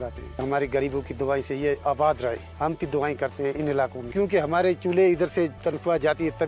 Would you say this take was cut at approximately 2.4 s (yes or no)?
no